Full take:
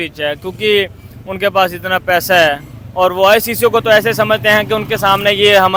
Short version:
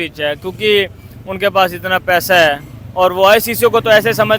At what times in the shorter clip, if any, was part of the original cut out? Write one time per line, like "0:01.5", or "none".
none